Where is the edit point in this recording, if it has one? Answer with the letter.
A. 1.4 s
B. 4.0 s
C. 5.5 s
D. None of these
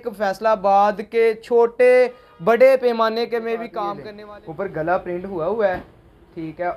B